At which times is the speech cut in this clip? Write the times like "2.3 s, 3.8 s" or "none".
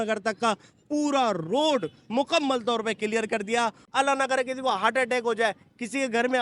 3.8 s